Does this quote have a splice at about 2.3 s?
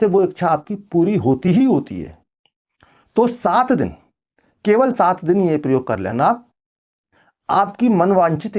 no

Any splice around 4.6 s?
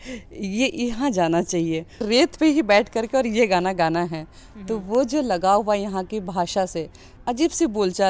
no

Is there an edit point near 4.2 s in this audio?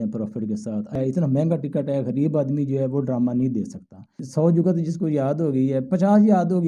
yes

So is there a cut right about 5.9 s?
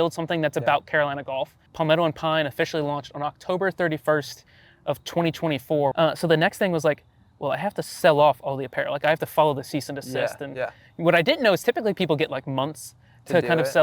yes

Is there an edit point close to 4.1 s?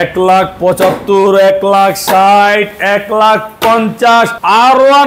no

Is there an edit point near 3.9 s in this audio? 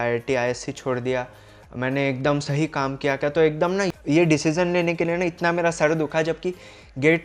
yes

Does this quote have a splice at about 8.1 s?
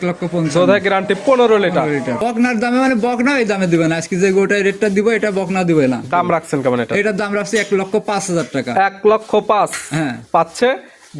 no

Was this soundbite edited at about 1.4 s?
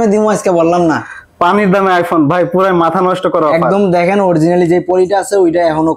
no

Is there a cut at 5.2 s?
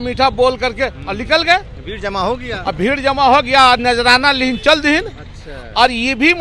no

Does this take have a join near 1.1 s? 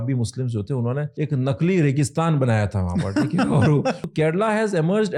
yes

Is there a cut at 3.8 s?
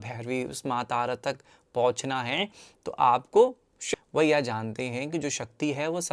yes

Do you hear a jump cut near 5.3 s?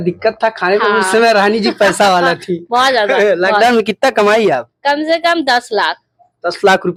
no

